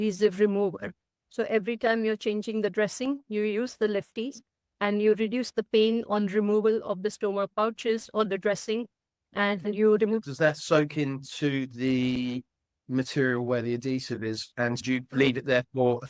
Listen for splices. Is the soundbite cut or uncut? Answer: uncut